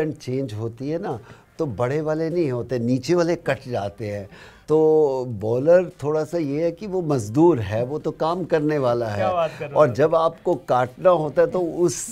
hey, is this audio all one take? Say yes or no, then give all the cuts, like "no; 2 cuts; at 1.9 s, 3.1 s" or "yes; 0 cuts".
yes; 0 cuts